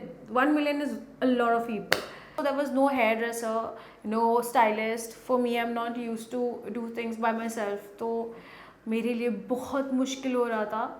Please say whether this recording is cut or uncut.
cut